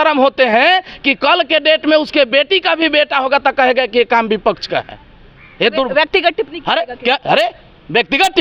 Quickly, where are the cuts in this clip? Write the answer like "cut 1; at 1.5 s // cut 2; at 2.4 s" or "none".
none